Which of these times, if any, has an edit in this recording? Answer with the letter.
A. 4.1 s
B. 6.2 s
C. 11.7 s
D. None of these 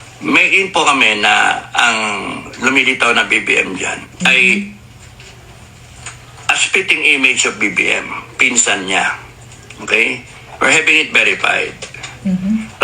A